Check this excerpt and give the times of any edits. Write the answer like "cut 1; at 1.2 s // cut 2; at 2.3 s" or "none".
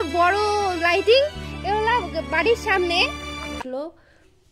cut 1; at 3.6 s